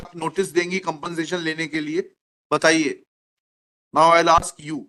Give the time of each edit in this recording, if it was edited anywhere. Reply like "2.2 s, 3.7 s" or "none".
none